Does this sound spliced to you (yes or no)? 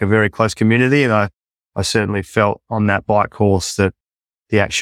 no